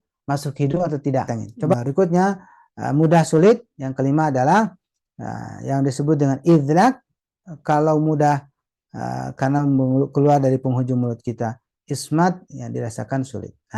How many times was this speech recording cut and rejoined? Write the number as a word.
one